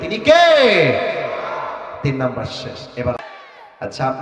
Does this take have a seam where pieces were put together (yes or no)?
yes